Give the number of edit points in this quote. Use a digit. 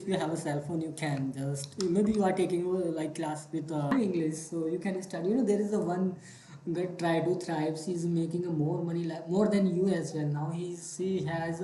1